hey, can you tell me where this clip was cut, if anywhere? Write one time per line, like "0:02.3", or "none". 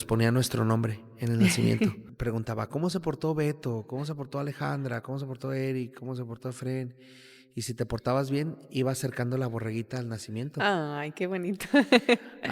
0:02.1

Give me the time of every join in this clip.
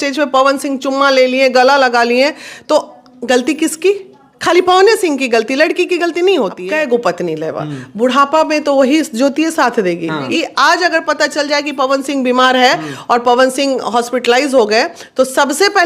0:06.6
0:10.3

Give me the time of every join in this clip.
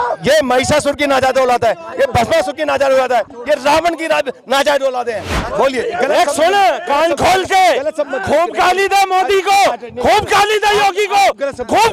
none

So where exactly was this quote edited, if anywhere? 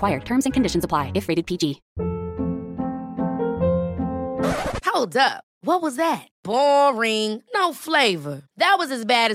0:01.9

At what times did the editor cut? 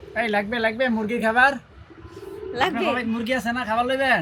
none

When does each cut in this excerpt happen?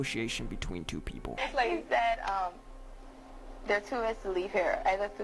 0:01.3

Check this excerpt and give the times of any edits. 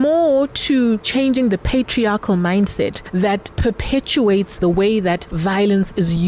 0:01.0
0:04.6
0:05.3

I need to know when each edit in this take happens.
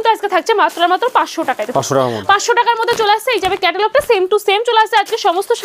none

